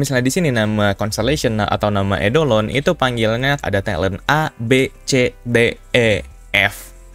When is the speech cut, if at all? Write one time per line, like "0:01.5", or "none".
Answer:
0:03.6